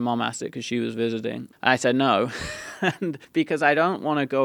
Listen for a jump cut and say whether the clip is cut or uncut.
cut